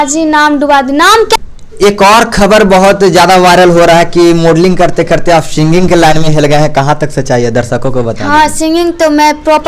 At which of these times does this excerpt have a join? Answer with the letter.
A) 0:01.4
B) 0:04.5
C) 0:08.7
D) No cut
A